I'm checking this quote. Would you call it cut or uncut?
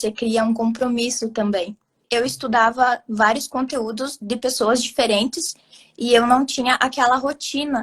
cut